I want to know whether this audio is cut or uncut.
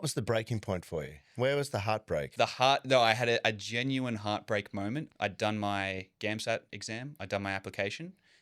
cut